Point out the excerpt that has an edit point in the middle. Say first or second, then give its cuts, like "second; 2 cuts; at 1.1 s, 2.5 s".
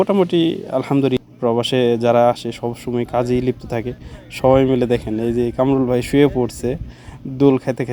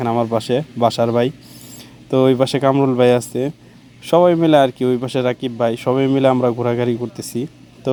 first; 1 cut; at 1.2 s